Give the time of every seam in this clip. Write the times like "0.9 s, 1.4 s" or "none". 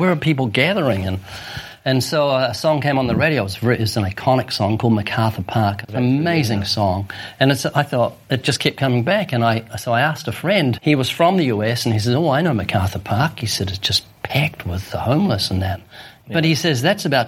5.9 s, 10.8 s, 16.2 s